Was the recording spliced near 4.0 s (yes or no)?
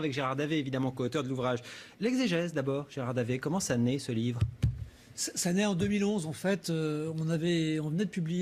yes